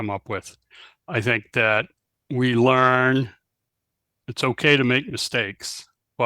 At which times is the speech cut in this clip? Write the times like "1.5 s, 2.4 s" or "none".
1.1 s